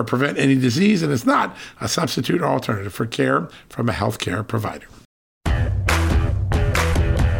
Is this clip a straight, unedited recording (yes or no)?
no